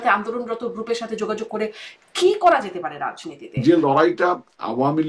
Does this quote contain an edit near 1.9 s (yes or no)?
no